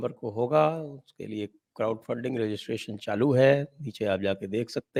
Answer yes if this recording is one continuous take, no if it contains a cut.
yes